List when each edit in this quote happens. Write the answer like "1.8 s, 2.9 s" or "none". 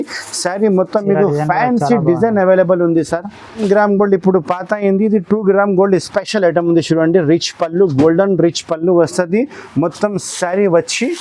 3.6 s